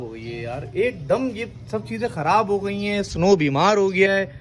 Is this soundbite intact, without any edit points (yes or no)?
yes